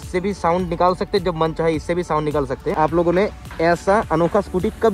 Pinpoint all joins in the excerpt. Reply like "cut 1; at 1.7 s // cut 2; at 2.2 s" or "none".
cut 1; at 2.8 s